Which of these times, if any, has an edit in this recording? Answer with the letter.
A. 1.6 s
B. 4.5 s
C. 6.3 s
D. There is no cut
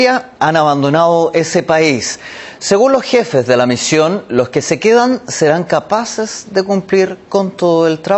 D